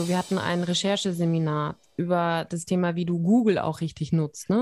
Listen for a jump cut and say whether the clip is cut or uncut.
uncut